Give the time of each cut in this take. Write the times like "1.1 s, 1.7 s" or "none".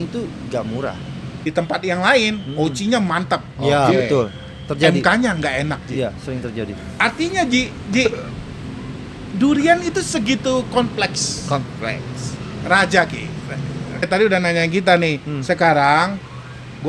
1.4 s, 14.1 s